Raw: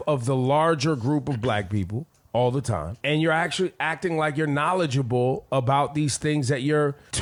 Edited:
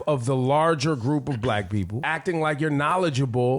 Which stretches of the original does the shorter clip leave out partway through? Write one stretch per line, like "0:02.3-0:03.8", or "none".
0:02.0-0:03.8